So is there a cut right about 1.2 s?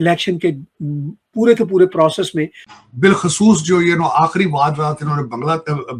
no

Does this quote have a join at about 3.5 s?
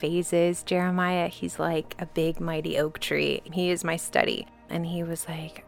yes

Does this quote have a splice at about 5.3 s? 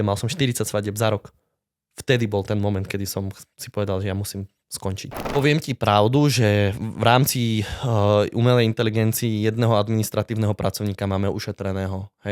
yes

